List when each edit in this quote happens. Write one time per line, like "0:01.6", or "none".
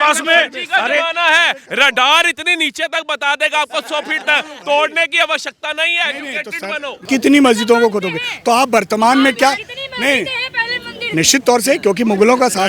0:06.9